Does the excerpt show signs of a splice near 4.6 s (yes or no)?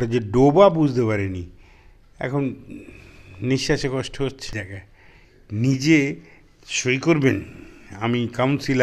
yes